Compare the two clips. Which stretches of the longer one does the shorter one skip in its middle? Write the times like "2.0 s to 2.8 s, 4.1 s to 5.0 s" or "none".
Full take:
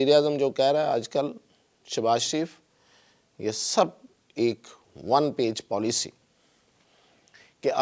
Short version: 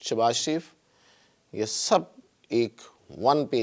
none